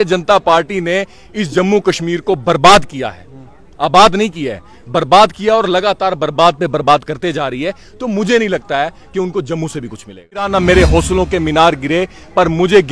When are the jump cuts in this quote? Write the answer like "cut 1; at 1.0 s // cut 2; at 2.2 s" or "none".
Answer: cut 1; at 10.5 s